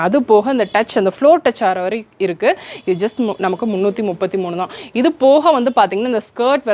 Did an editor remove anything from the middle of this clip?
no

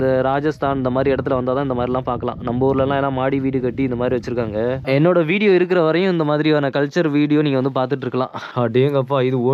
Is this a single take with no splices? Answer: no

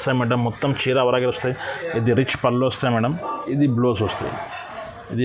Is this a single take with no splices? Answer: no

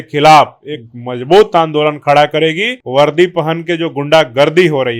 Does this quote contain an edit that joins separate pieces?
yes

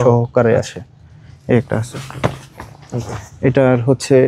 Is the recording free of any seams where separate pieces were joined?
yes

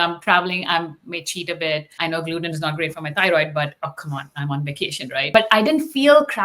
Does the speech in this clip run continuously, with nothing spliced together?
no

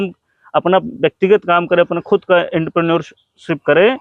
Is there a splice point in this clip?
no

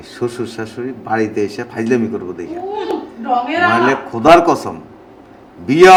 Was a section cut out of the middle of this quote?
no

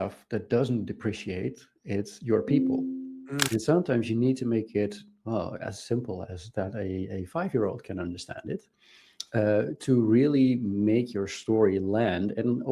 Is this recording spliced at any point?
yes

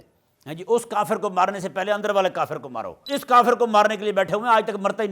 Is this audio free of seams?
no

